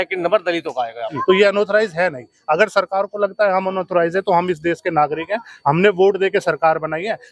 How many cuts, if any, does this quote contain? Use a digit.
1